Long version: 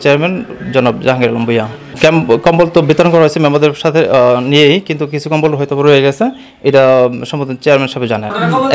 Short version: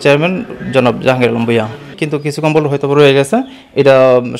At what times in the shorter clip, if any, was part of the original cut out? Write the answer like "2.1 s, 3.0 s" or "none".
1.9 s